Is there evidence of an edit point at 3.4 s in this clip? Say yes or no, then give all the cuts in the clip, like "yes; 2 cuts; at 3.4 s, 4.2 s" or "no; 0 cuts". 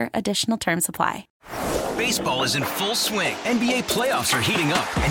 no; 1 cut; at 1.3 s